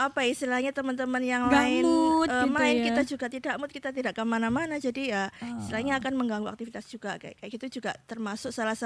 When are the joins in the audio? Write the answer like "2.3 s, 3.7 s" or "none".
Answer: none